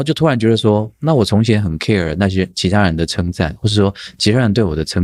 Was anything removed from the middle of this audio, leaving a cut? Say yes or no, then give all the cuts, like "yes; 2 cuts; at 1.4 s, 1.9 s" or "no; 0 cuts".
no; 0 cuts